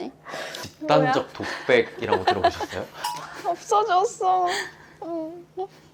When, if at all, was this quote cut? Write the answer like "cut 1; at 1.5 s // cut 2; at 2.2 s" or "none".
none